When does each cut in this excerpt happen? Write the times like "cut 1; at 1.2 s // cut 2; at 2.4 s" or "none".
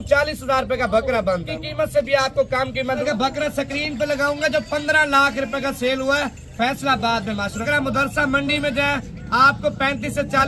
cut 1; at 1.5 s // cut 2; at 3.0 s // cut 3; at 7.6 s